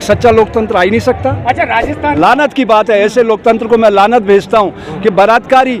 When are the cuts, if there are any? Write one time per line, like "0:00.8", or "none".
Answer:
0:02.2